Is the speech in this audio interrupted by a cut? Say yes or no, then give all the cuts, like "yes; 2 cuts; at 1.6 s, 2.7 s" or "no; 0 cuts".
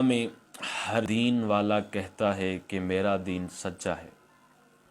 yes; 1 cut; at 1.1 s